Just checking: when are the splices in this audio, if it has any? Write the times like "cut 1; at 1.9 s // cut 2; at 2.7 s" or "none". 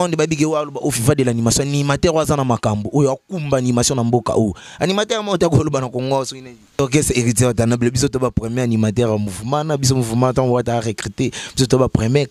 cut 1; at 6.7 s